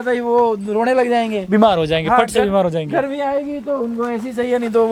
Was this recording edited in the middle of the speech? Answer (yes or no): no